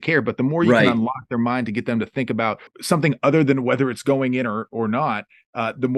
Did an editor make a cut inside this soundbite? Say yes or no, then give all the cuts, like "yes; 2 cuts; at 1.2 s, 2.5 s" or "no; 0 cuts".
yes; 1 cut; at 2.7 s